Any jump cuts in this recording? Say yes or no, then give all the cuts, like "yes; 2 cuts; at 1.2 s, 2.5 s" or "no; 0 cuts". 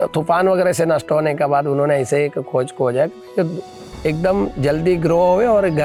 no; 0 cuts